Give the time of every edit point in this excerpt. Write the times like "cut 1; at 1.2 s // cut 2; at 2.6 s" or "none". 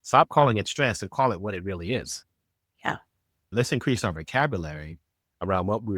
cut 1; at 3.5 s